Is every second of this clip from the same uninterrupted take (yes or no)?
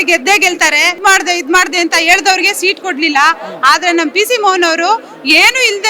no